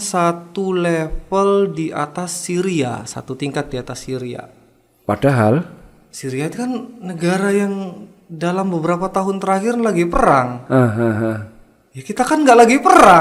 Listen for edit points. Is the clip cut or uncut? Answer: uncut